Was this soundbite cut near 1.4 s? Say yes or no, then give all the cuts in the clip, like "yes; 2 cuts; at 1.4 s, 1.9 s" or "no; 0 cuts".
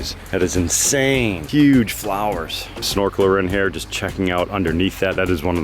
yes; 2 cuts; at 1.4 s, 2.8 s